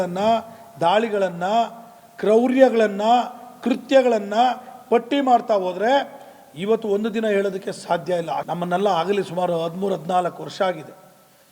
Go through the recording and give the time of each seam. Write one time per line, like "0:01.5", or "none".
0:08.5